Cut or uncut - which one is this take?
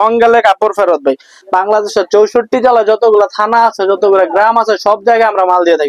cut